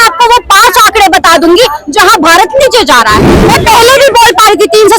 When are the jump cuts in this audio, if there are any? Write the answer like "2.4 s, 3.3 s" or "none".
3.4 s

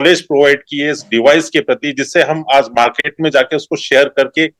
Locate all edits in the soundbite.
none

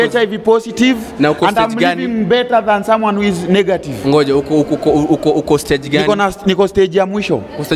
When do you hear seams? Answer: none

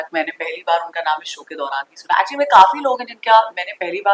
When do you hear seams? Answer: none

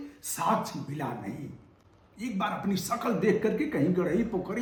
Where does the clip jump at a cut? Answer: none

